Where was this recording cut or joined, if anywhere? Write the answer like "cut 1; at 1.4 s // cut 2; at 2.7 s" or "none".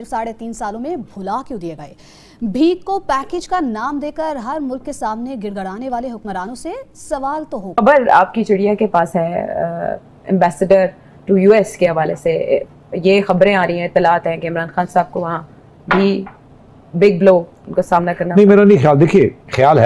cut 1; at 7.7 s

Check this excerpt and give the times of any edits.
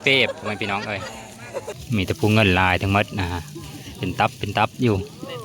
cut 1; at 1.8 s

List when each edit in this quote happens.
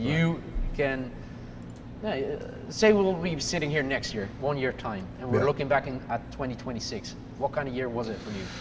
cut 1; at 1.6 s

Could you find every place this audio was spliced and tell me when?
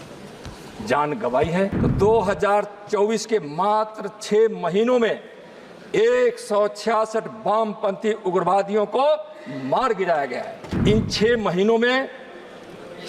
cut 1; at 1.8 s // cut 2; at 10.6 s

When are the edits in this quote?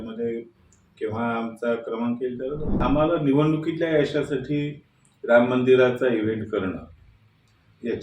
cut 1; at 2.8 s

